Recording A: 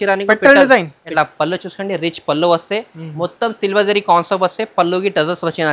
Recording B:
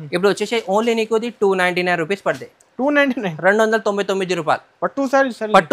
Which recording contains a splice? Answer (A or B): A